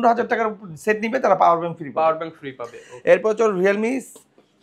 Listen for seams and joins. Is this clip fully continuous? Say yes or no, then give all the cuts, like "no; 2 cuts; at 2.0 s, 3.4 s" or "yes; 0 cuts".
yes; 0 cuts